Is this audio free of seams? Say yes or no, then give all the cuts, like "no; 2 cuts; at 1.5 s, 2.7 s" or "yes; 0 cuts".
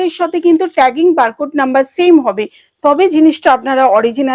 yes; 0 cuts